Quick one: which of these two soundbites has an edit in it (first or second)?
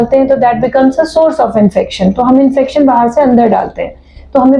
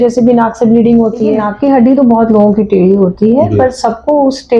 second